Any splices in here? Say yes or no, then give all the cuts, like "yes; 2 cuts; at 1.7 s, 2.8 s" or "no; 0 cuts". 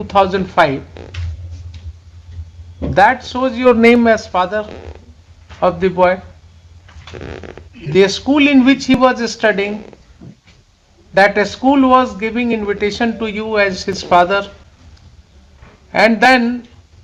no; 0 cuts